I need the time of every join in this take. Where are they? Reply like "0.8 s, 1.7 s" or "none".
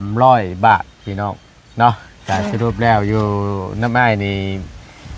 none